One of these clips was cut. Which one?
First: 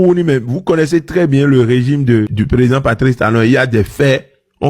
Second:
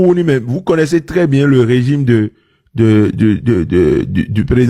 first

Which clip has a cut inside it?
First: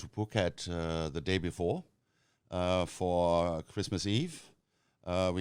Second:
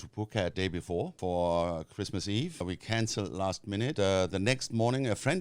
second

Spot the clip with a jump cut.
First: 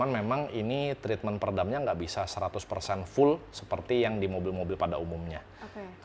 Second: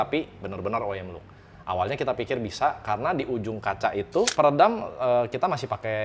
second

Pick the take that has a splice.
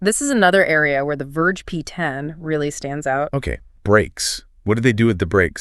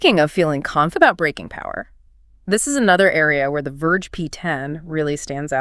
second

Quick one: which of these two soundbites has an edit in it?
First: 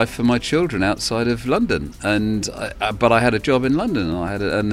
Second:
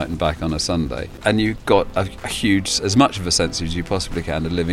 second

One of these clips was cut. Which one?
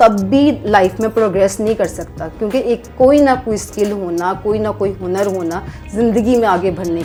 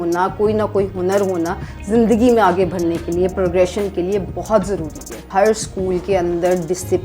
second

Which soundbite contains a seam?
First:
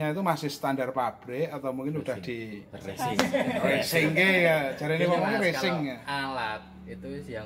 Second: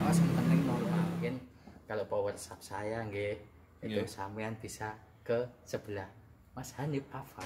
second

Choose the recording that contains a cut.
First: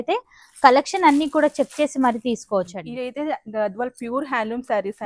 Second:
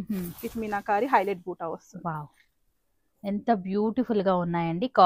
first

